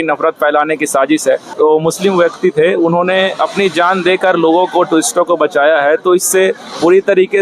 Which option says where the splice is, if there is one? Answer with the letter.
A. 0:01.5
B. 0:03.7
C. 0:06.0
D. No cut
A